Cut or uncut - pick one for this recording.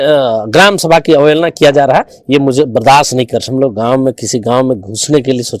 cut